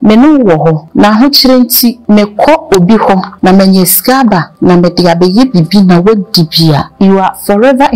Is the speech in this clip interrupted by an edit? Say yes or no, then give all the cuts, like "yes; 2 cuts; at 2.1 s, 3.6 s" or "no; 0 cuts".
yes; 5 cuts; at 0.8 s, 2.0 s, 3.3 s, 4.5 s, 6.9 s